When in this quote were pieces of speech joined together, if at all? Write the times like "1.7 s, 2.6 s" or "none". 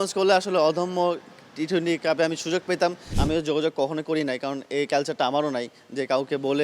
3.1 s